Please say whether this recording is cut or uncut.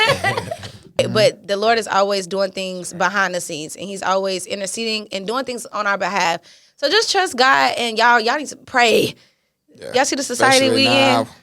cut